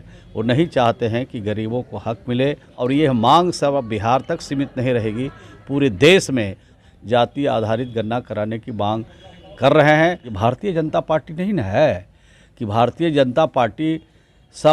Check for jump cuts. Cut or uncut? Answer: cut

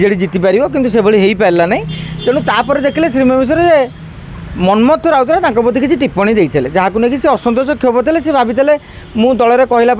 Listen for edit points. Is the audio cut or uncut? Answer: uncut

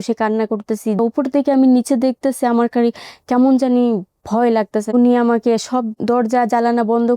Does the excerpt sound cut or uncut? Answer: cut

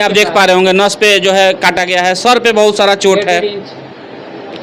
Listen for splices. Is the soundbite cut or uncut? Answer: uncut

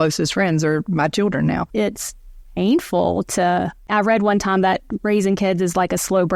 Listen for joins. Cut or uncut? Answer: cut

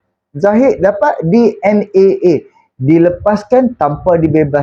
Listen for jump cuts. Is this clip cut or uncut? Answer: uncut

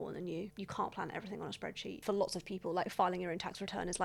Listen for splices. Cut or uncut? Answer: cut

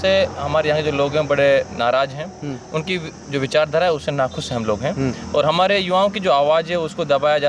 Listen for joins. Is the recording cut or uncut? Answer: uncut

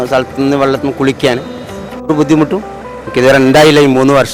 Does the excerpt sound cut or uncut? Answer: uncut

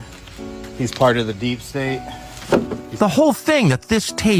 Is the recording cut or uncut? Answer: cut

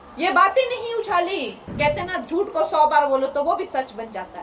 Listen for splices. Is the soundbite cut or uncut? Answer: cut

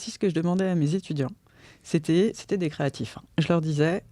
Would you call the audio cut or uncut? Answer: uncut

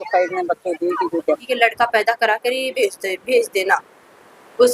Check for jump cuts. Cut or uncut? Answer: cut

